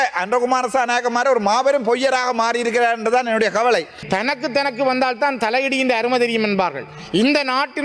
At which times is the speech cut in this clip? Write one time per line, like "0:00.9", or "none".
0:04.0